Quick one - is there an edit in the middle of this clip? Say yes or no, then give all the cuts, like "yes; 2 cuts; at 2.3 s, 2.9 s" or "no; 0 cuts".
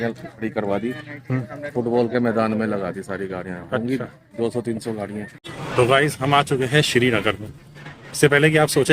yes; 1 cut; at 5.4 s